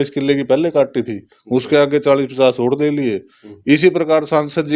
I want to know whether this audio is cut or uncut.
uncut